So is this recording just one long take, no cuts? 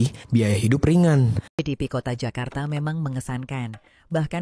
no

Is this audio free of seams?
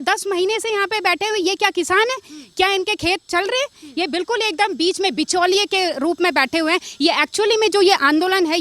yes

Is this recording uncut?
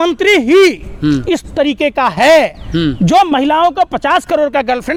yes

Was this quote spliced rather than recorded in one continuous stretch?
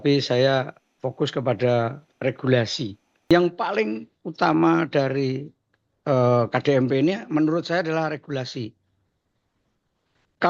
yes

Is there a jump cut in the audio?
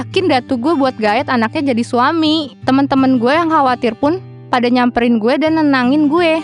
yes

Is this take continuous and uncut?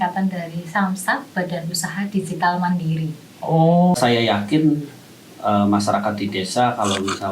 no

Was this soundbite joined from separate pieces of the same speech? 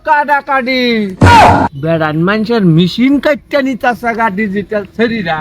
yes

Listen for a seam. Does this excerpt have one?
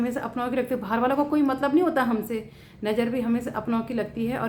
no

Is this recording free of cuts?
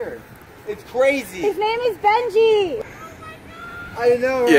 no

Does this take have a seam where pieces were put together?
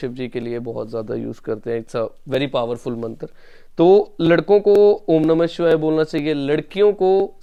no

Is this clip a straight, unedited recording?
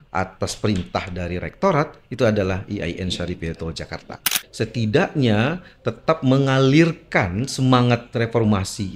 no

